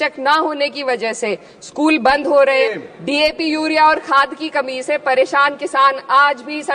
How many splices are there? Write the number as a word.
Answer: one